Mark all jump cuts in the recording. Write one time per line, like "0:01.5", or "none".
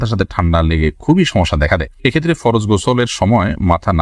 none